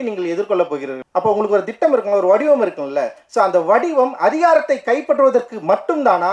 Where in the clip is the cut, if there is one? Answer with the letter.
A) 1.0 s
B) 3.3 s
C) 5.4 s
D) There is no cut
A